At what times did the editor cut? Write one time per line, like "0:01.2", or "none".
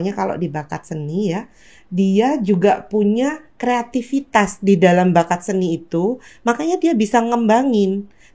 none